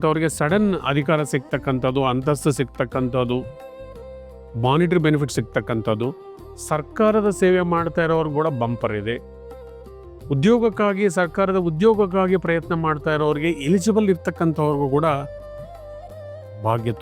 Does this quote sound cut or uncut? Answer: uncut